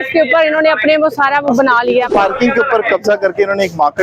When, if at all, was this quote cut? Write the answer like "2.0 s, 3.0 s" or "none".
2.1 s